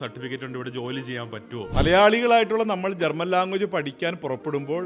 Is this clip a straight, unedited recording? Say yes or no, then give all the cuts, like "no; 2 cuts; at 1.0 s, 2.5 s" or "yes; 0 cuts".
no; 1 cut; at 1.7 s